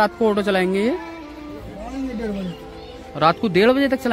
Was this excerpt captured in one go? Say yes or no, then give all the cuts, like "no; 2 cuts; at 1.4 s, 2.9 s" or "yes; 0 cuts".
yes; 0 cuts